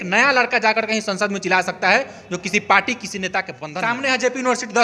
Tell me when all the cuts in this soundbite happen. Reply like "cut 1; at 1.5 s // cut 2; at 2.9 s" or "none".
cut 1; at 3.6 s

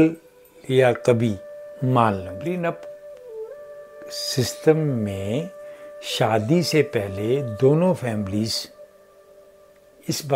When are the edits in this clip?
cut 1; at 2.3 s

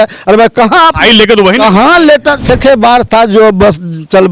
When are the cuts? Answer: cut 1; at 2.4 s

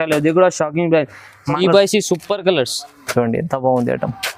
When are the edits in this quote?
cut 1; at 1.5 s

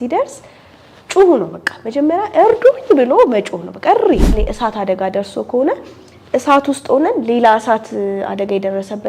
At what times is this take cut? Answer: cut 1; at 4.3 s

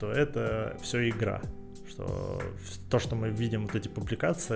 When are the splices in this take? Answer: none

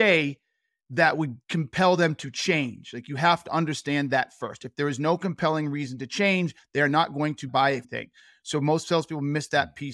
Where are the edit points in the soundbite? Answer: cut 1; at 7.5 s

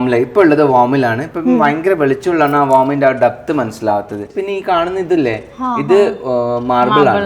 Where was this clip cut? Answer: cut 1; at 4.3 s

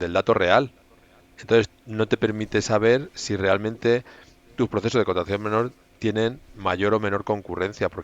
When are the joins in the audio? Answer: none

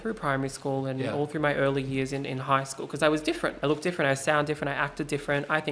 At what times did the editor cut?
cut 1; at 3.6 s

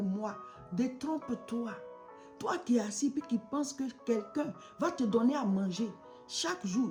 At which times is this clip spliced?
none

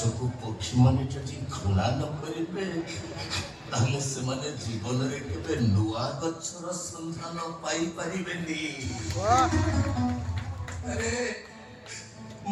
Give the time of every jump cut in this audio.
none

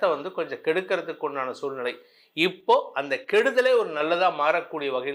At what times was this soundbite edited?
none

